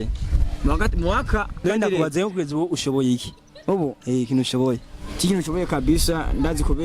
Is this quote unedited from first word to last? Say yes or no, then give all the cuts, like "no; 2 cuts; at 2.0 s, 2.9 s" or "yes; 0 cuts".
no; 1 cut; at 1.6 s